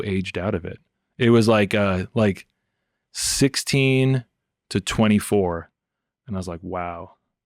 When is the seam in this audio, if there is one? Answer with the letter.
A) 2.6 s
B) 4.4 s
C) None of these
C